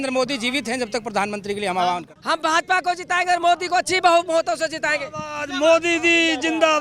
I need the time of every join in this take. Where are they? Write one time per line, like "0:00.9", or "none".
0:02.1